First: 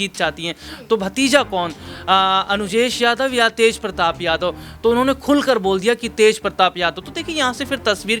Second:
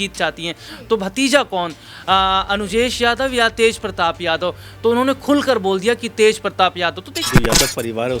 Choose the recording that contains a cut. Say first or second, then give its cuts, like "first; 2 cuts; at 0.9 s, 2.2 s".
second; 1 cut; at 7.3 s